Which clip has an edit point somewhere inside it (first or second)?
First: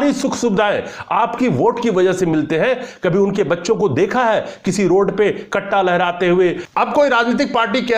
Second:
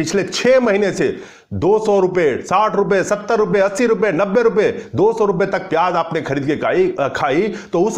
first